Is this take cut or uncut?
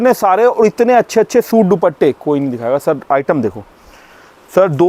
uncut